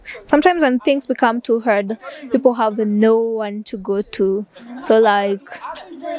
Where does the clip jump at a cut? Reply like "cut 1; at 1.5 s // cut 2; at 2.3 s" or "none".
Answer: none